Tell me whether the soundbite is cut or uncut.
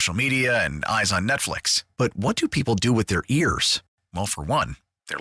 uncut